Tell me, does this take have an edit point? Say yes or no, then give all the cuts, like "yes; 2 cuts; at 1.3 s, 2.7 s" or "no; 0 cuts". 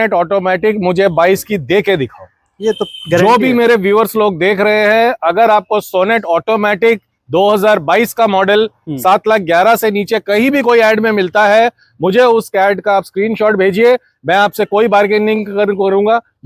no; 0 cuts